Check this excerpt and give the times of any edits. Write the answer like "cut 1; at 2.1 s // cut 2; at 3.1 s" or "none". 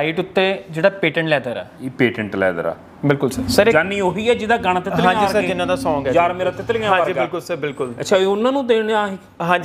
cut 1; at 3.4 s